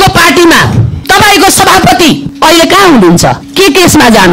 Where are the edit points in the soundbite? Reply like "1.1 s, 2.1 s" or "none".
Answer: 0.9 s, 2.3 s, 3.4 s